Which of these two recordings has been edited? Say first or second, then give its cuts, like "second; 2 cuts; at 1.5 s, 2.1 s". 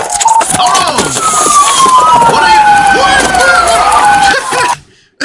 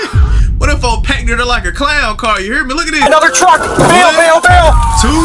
second; 1 cut; at 3.1 s